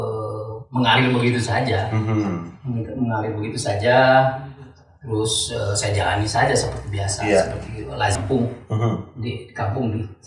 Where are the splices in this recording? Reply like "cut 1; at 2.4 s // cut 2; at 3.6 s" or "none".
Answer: cut 1; at 8.2 s